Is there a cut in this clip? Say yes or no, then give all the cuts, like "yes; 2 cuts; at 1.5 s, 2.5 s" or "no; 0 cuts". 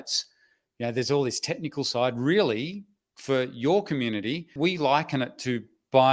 yes; 1 cut; at 4.5 s